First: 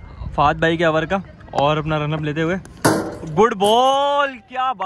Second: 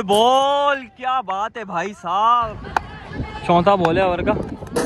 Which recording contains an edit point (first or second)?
second